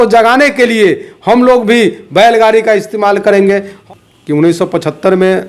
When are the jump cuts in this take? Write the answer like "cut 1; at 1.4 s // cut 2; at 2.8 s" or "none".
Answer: cut 1; at 3.7 s